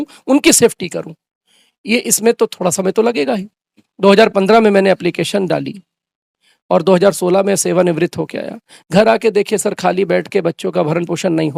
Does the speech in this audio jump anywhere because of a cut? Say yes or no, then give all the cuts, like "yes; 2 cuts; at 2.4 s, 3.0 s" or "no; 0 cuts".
no; 0 cuts